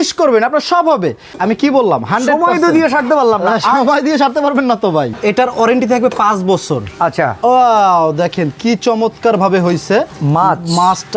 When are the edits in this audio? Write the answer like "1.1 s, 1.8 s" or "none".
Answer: 1.3 s, 5.1 s